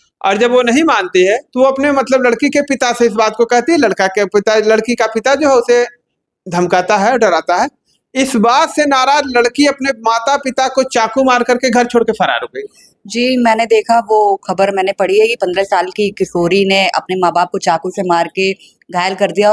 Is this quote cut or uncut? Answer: uncut